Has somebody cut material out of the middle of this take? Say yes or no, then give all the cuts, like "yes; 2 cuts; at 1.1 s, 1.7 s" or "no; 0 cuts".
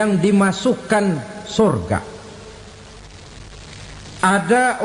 no; 0 cuts